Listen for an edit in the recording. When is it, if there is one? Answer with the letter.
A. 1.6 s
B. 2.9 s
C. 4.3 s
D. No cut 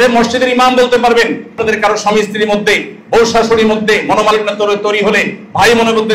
A